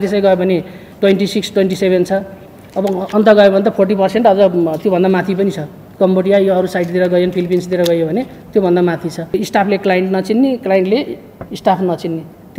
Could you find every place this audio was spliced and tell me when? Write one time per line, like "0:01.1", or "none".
0:09.3